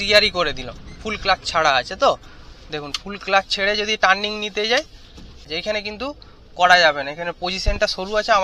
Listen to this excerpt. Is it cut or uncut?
cut